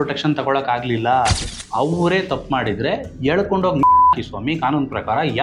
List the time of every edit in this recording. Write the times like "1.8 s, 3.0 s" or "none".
1.5 s